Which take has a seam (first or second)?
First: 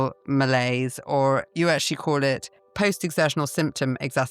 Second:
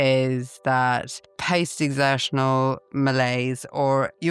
first